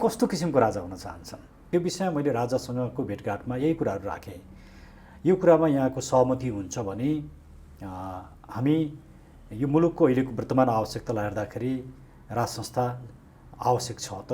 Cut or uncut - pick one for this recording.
cut